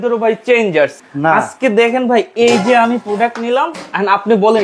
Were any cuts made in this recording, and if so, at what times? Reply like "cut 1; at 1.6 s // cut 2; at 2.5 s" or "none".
cut 1; at 1.0 s